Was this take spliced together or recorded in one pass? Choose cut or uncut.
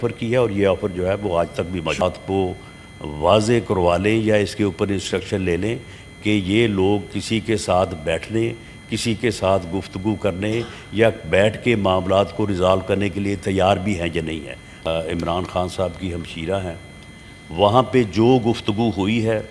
cut